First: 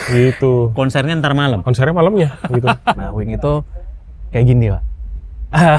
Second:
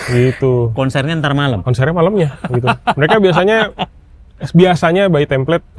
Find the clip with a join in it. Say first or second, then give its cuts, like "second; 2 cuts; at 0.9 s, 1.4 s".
first; 1 cut; at 3.0 s